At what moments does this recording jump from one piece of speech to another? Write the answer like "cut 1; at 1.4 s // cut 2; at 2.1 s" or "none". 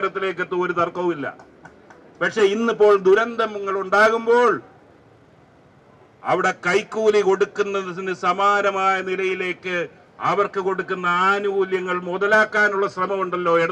none